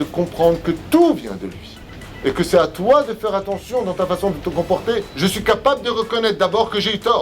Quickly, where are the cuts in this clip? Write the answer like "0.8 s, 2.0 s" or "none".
5.1 s

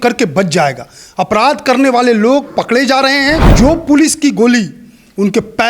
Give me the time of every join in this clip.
3.5 s

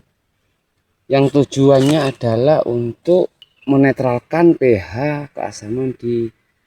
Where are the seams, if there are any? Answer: 3.5 s

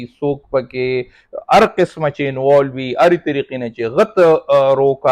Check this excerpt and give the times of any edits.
none

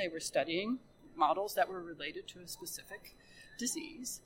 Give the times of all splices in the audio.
1.0 s

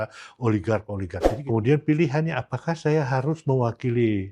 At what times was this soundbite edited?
1.3 s

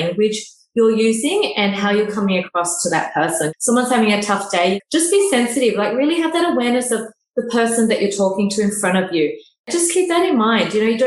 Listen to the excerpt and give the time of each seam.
3.5 s, 4.8 s, 9.7 s

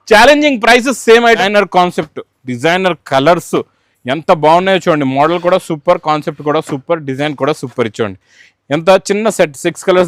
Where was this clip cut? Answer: 1.4 s

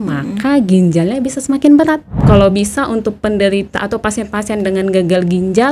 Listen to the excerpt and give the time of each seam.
2.1 s

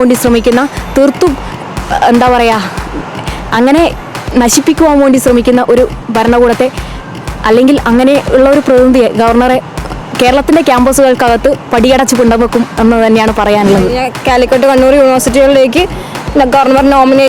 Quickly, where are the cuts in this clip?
14.0 s

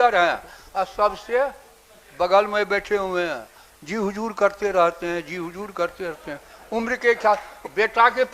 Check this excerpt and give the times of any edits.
none

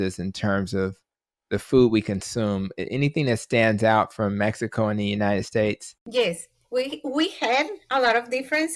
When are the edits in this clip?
5.9 s

